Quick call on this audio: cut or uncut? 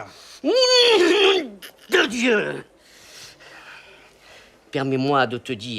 cut